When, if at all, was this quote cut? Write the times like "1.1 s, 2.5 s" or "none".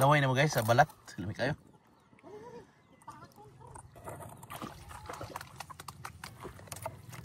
6.2 s